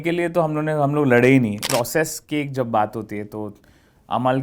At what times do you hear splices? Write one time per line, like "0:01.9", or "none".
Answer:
0:01.6